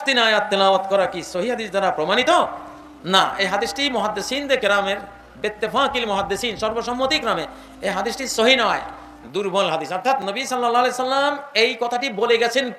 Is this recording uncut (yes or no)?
yes